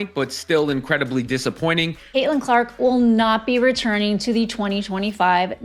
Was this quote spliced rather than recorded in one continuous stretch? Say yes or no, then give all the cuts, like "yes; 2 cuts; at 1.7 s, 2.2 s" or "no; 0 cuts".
yes; 1 cut; at 2.1 s